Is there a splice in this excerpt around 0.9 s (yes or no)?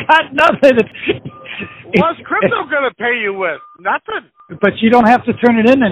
yes